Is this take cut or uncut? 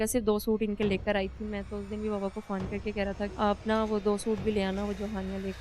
cut